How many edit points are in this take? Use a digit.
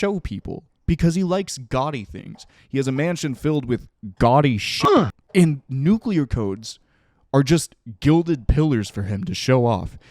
1